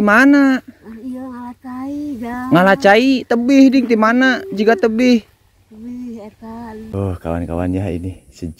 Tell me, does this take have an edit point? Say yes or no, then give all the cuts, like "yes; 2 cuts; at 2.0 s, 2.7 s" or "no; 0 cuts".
yes; 1 cut; at 6.8 s